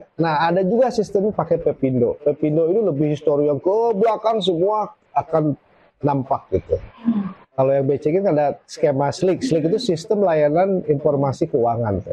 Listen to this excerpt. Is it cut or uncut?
uncut